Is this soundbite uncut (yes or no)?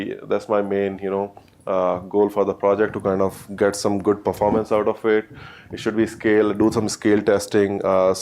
no